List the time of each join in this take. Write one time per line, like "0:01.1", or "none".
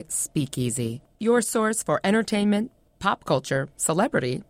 none

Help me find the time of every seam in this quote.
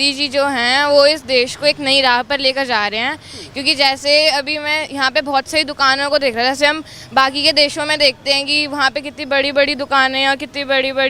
none

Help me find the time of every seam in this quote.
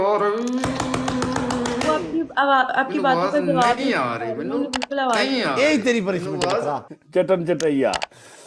0:06.9

